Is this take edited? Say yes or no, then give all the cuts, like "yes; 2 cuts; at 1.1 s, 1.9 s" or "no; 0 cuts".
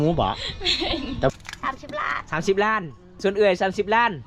yes; 2 cuts; at 1.3 s, 3.1 s